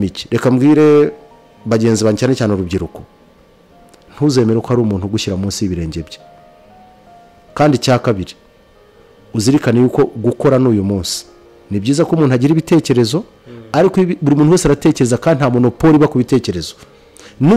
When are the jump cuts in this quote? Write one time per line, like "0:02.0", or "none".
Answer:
none